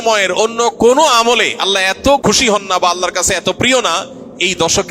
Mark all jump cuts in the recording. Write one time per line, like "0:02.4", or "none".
0:02.2